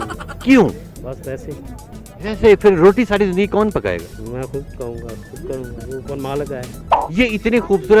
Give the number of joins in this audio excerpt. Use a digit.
1